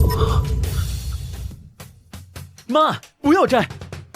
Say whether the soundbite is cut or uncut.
cut